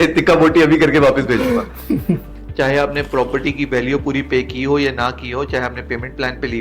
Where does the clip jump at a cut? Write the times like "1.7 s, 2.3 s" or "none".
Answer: 2.3 s